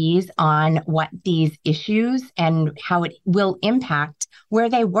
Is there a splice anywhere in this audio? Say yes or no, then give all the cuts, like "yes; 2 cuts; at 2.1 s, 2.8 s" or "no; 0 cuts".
yes; 1 cut; at 2.8 s